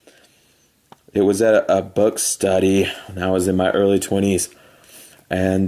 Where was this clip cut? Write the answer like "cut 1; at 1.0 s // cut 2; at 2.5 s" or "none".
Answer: none

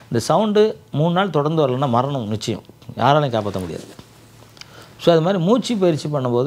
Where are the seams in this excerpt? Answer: none

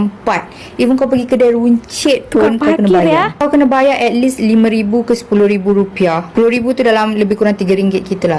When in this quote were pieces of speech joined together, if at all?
none

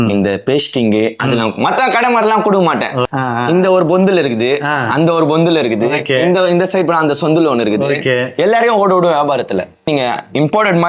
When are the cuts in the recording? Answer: cut 1; at 3.1 s // cut 2; at 9.9 s

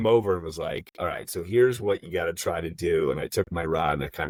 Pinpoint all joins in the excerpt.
none

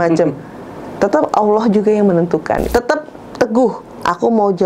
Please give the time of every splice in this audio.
cut 1; at 2.7 s

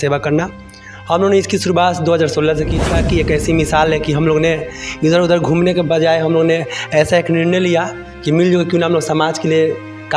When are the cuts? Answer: cut 1; at 2.8 s

